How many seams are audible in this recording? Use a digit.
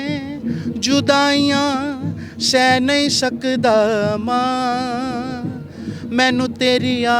0